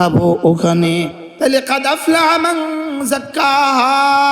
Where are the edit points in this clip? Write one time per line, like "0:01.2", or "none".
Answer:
0:01.2